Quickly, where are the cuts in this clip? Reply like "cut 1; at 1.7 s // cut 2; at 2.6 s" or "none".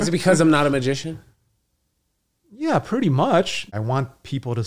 cut 1; at 3.7 s